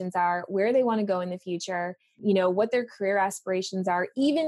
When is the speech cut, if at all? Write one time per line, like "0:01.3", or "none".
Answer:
0:02.1